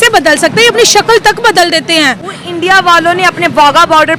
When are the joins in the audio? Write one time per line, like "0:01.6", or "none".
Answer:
none